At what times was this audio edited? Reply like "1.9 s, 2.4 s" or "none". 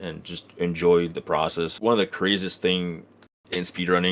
1.7 s